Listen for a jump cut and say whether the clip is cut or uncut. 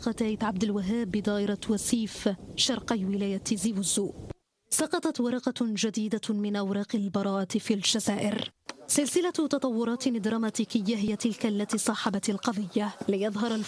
cut